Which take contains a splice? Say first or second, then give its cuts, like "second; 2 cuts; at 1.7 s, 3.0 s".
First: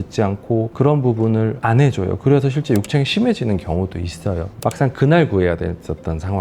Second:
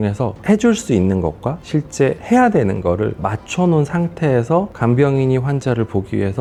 first; 1 cut; at 4.5 s